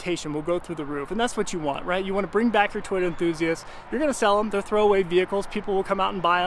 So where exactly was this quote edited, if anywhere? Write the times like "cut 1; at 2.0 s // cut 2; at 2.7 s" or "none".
none

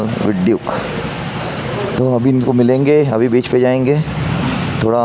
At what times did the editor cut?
none

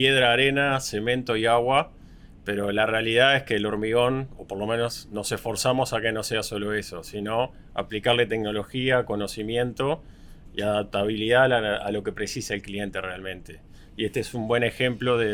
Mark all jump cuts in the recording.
none

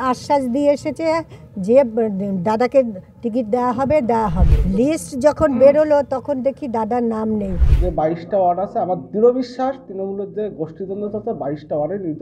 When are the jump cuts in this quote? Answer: cut 1; at 4.5 s // cut 2; at 7.7 s

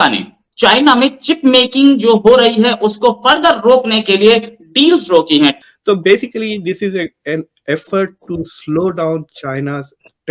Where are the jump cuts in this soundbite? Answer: cut 1; at 5.6 s

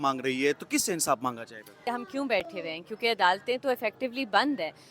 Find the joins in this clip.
cut 1; at 1.9 s

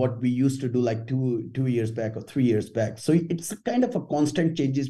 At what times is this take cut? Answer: none

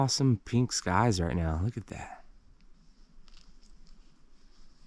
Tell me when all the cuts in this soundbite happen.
none

